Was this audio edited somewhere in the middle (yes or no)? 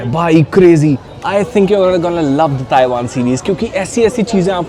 no